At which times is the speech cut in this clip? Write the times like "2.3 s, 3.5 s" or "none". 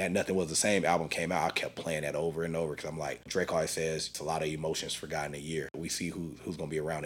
3.3 s, 4.2 s, 5.8 s